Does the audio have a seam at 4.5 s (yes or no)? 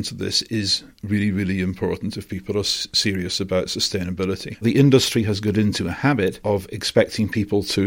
yes